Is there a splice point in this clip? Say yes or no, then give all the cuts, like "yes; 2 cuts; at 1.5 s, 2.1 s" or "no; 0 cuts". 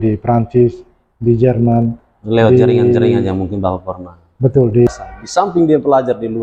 yes; 1 cut; at 4.9 s